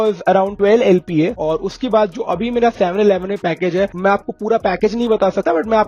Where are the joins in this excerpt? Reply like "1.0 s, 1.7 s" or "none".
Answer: 1.3 s